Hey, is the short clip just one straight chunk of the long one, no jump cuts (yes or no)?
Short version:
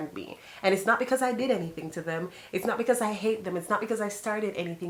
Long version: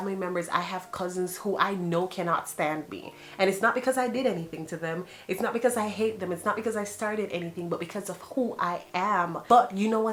yes